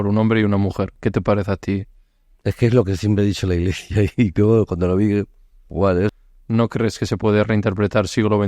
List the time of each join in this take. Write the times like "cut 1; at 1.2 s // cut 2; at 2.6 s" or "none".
cut 1; at 6.1 s